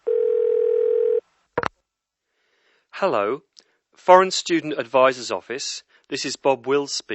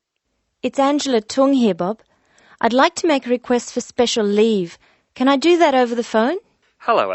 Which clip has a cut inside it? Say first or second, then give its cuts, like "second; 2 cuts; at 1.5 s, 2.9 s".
first; 1 cut; at 1.0 s